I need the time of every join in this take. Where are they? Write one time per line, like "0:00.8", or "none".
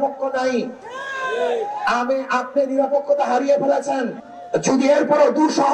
0:04.2